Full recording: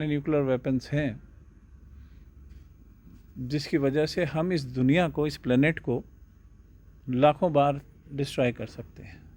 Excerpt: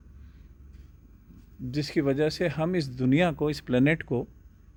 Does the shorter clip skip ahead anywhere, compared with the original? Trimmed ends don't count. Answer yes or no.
no